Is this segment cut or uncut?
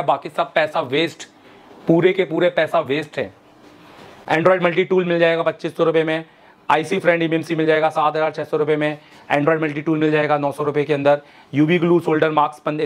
uncut